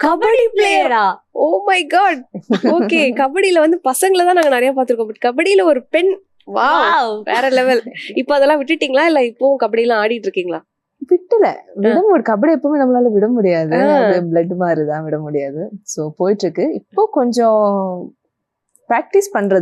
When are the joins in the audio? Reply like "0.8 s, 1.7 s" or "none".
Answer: none

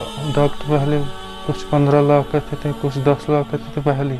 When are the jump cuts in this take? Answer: none

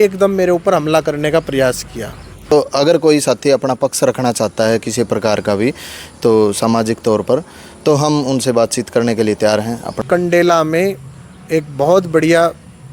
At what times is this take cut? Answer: 2.4 s, 10.0 s

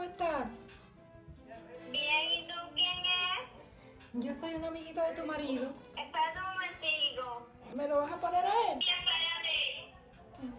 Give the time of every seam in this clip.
5.9 s, 7.6 s, 8.8 s

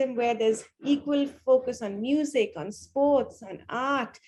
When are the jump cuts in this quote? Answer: none

